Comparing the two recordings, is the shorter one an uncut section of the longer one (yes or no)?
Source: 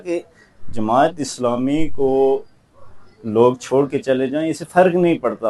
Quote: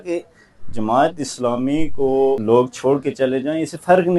no